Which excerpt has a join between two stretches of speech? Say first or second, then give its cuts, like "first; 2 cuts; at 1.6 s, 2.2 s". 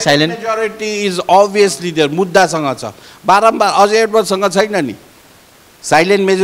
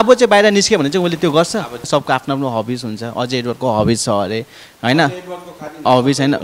second; 1 cut; at 1.9 s